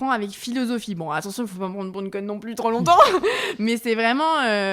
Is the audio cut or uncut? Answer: uncut